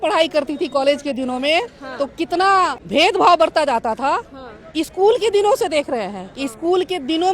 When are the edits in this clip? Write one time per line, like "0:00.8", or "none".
0:02.8